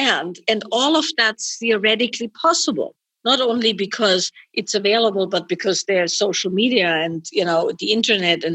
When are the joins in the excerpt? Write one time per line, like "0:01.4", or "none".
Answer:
0:03.0